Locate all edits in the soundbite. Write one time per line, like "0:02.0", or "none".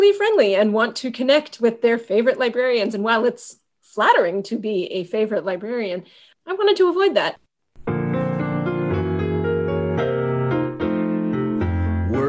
0:07.4